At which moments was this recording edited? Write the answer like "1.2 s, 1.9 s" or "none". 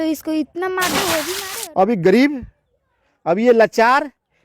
1.4 s